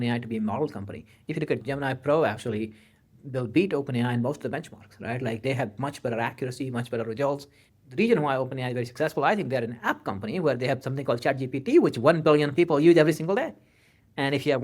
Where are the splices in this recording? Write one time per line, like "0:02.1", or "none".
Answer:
0:01.6
0:07.6